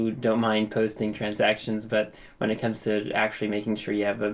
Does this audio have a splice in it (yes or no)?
no